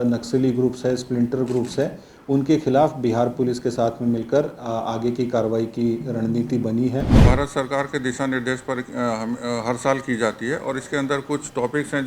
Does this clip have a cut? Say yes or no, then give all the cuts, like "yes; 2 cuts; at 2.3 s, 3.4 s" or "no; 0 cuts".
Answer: yes; 1 cut; at 7.2 s